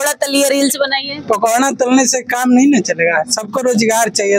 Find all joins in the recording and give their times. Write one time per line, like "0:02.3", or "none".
none